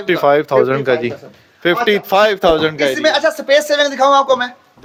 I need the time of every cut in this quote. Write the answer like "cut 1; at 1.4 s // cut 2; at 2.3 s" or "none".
none